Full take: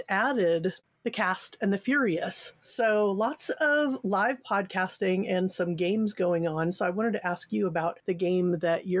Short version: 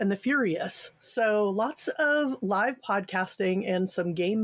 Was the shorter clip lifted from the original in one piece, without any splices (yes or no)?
yes